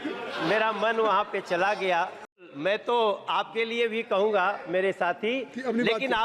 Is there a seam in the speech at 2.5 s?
yes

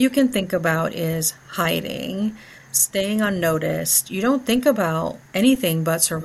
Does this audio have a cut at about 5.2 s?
yes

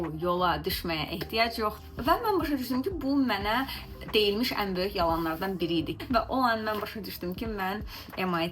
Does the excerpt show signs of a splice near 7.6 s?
no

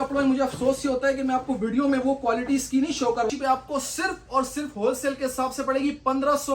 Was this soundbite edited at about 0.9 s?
no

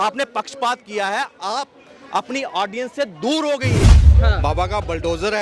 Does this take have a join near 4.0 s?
yes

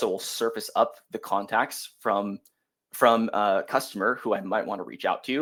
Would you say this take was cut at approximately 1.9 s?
no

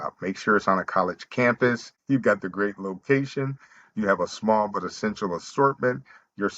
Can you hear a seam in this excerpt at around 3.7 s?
no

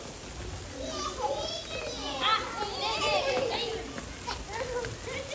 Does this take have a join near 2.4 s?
no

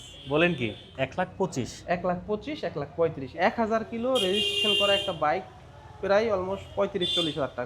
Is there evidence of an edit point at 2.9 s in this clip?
yes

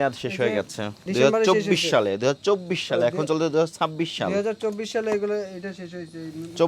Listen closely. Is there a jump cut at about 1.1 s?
yes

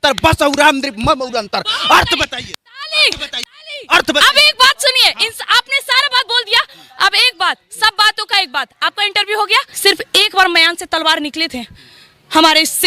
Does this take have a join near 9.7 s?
yes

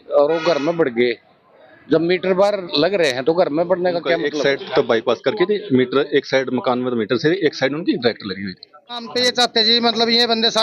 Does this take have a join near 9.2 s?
yes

